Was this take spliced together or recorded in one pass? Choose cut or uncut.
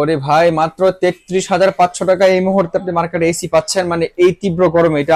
uncut